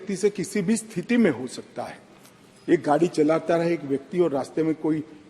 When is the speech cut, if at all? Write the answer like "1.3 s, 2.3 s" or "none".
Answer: none